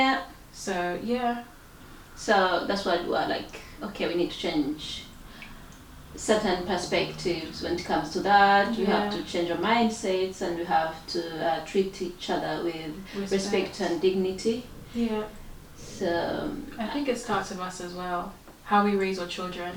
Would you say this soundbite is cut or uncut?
uncut